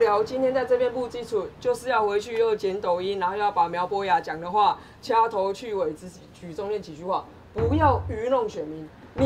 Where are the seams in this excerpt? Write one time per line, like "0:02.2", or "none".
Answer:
none